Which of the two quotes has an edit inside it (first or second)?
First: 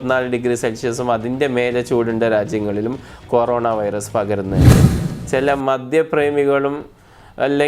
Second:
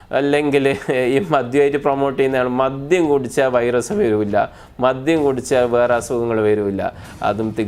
first